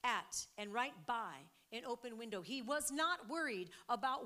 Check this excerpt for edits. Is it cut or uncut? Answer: uncut